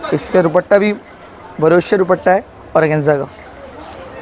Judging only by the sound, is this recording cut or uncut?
uncut